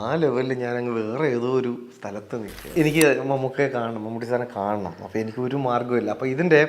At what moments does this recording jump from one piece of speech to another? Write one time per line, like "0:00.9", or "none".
0:02.6

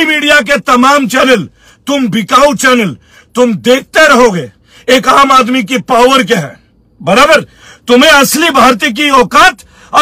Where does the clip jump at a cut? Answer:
none

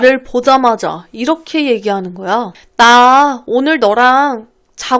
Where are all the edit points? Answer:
none

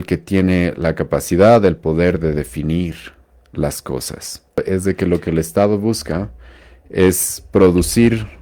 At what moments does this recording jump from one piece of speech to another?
0:04.6

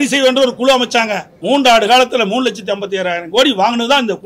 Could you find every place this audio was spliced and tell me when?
0:01.3

